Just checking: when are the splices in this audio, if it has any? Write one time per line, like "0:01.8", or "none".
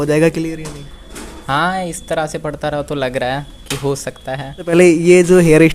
0:04.7